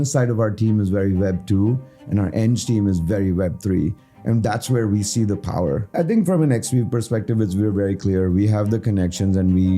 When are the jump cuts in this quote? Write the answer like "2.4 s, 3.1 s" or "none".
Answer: 5.9 s